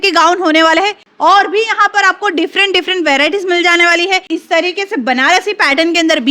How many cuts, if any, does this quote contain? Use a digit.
2